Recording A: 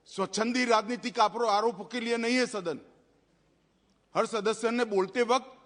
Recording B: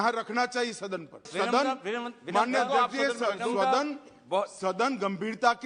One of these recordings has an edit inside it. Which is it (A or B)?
B